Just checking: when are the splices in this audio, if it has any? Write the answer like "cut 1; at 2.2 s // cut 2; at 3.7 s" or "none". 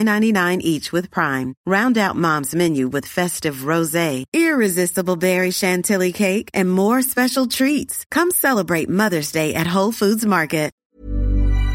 cut 1; at 10.8 s

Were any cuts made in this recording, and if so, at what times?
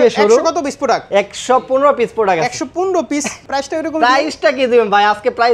cut 1; at 3.4 s

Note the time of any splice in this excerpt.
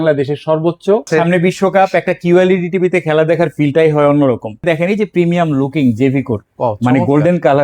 cut 1; at 1.1 s // cut 2; at 4.6 s

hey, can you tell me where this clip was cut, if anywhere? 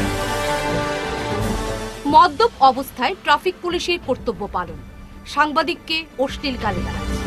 cut 1; at 1.5 s

